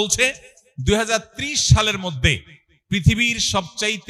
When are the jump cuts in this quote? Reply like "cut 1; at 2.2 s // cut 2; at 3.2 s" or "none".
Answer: none